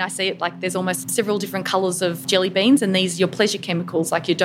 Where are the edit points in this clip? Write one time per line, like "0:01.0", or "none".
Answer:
0:01.1
0:02.2